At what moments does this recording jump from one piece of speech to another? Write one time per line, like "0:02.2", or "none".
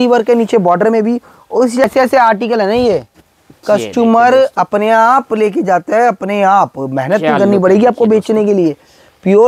0:01.8

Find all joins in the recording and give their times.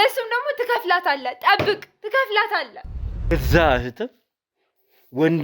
0:03.3

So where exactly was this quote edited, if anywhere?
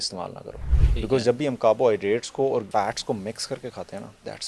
0:02.7

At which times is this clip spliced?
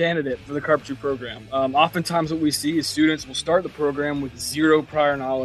none

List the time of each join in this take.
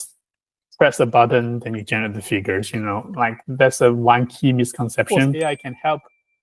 0:05.3

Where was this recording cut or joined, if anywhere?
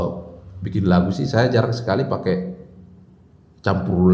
none

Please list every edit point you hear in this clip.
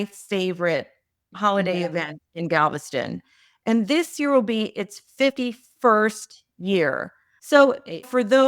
none

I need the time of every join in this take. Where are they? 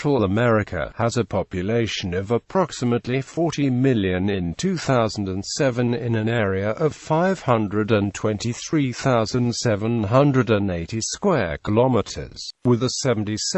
0:08.0

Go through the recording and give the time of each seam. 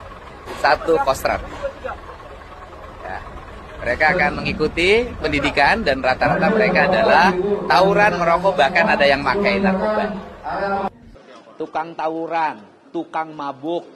0:11.1

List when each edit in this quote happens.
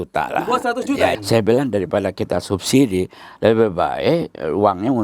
0:01.1

